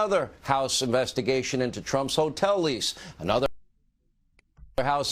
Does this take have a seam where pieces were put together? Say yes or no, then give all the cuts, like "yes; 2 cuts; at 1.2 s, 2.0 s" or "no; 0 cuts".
no; 0 cuts